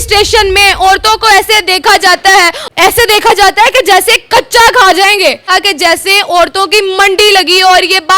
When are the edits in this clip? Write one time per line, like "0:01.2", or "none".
0:02.6
0:05.5